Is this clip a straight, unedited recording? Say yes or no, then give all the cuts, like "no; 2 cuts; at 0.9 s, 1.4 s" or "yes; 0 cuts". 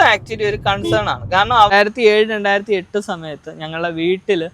no; 1 cut; at 1.7 s